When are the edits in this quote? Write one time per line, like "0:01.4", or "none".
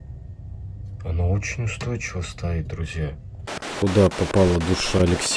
0:03.5